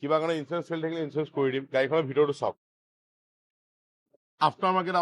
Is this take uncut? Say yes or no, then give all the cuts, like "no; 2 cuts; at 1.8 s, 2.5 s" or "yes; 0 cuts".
yes; 0 cuts